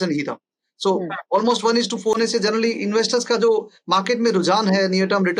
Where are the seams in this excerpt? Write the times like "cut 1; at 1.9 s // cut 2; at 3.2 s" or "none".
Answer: cut 1; at 2.2 s